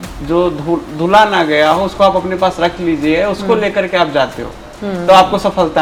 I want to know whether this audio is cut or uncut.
uncut